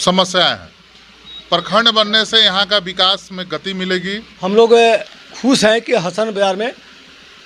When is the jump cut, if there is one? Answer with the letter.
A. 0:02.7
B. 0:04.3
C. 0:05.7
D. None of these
B